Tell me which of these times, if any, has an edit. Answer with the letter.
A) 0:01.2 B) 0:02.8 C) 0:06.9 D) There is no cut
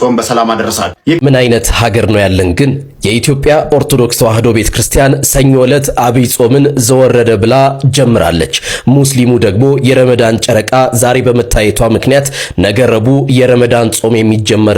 A